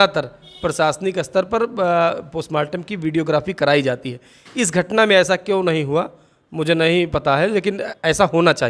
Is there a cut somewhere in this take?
no; 0 cuts

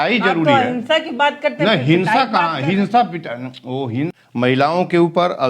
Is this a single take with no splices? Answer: no; 1 cut; at 4.1 s

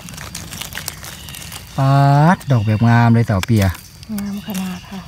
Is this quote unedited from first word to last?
yes; 0 cuts

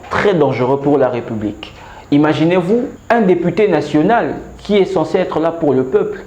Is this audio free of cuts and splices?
no; 1 cut; at 3.0 s

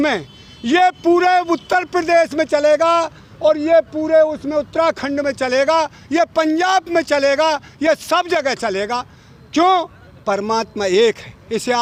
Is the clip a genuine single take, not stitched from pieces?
yes; 0 cuts

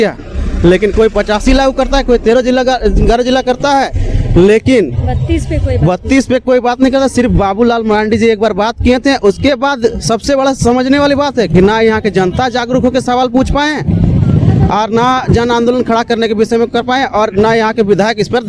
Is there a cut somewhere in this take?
no; 0 cuts

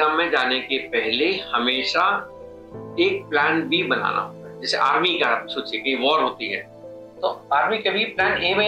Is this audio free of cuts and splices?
yes; 0 cuts

